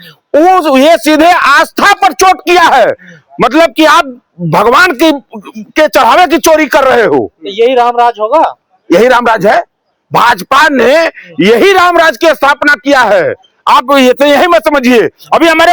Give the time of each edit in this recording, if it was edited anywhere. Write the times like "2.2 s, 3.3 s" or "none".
none